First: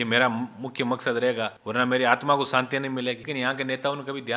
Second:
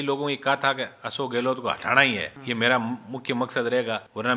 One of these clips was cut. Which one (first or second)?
first